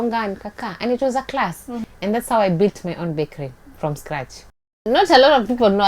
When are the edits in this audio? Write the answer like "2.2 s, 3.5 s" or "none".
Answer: 1.9 s, 4.6 s

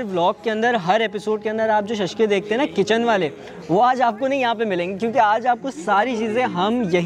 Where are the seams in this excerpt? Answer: none

